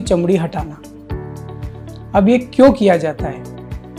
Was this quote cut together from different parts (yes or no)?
no